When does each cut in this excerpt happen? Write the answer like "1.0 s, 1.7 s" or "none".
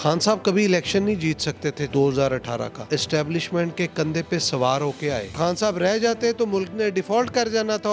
1.8 s, 2.8 s, 5.4 s